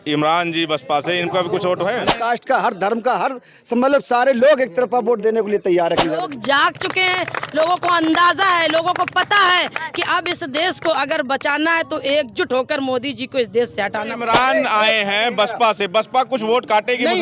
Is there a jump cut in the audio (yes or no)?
yes